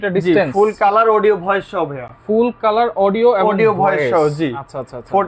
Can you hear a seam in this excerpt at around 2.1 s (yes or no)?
no